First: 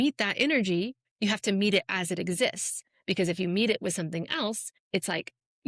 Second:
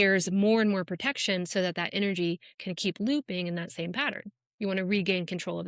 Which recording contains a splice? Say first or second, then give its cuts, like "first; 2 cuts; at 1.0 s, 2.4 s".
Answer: first; 2 cuts; at 1.0 s, 4.7 s